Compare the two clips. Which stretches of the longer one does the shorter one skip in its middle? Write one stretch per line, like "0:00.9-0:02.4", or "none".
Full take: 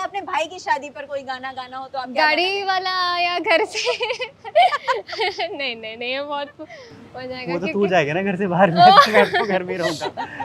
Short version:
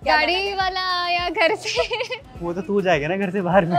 0:04.4-0:07.4